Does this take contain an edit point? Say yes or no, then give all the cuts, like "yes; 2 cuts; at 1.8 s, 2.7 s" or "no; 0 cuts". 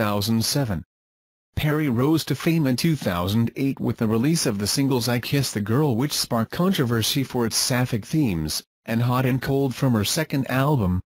yes; 1 cut; at 6.8 s